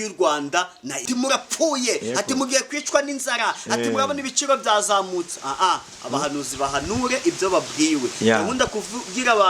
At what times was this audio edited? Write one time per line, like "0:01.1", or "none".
0:01.0